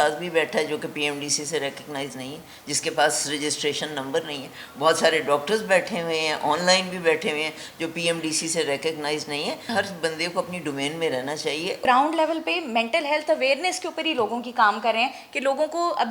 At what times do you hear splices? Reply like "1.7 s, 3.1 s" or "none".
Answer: 9.6 s, 11.8 s